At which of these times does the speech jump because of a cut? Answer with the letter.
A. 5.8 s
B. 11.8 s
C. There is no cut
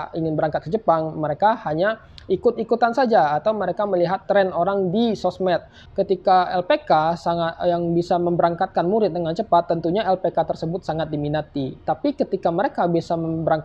A